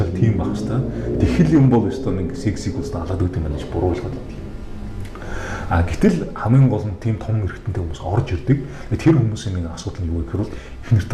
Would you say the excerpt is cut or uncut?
uncut